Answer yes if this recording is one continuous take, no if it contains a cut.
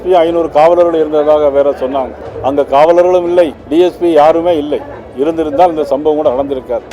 no